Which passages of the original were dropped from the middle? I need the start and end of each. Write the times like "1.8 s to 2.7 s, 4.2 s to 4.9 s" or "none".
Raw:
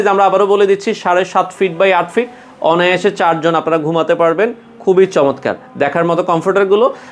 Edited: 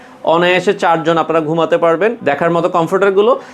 4.6 s to 5.7 s